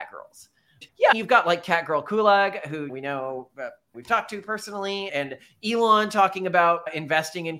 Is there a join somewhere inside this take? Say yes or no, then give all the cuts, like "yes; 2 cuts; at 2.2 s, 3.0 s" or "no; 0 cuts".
no; 0 cuts